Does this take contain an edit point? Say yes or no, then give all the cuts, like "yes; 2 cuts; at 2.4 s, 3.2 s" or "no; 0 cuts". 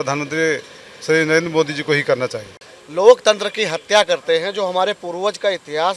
yes; 1 cut; at 2.6 s